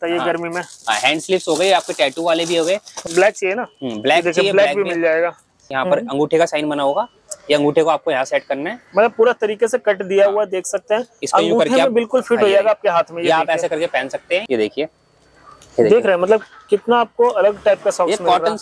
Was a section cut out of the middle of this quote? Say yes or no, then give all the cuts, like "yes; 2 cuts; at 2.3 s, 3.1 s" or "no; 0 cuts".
yes; 3 cuts; at 3.0 s, 5.6 s, 14.4 s